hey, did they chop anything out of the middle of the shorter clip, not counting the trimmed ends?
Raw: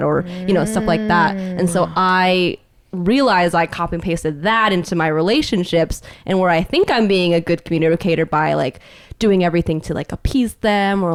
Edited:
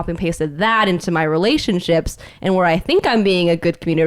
no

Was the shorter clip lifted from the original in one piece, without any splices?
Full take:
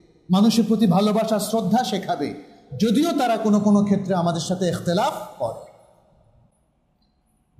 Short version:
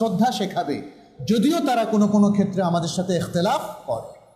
yes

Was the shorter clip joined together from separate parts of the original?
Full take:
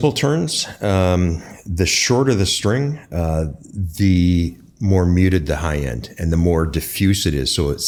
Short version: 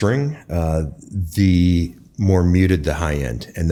no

